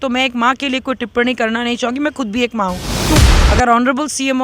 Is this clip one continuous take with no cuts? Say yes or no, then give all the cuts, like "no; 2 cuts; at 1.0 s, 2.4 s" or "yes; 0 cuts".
no; 1 cut; at 3.2 s